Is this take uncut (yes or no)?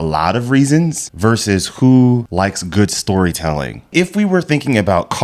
no